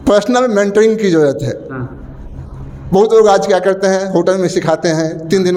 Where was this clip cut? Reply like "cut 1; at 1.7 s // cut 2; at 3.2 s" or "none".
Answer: none